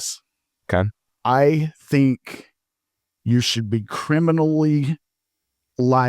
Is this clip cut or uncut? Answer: cut